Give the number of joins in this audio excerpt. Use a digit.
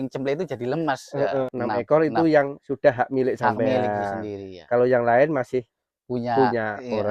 1